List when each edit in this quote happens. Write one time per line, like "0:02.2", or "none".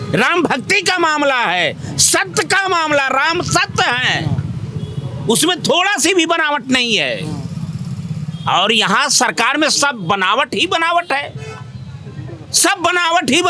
none